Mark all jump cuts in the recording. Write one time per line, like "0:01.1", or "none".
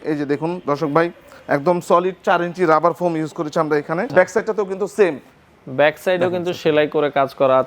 0:04.1